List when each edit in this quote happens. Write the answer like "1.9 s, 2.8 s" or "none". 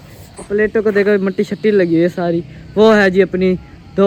none